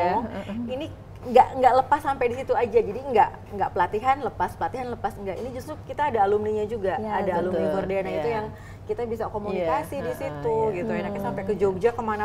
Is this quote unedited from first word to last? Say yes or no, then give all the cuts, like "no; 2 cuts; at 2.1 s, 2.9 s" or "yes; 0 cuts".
yes; 0 cuts